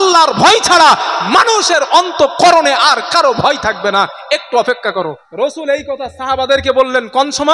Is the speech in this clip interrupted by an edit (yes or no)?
yes